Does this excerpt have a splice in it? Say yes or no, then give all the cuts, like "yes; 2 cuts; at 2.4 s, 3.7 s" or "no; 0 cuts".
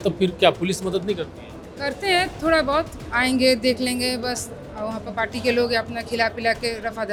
no; 0 cuts